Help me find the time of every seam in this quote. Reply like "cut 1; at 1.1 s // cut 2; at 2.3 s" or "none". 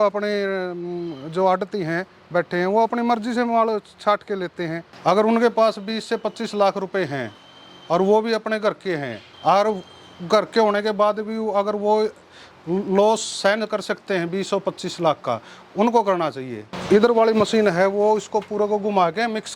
cut 1; at 4.8 s // cut 2; at 16.6 s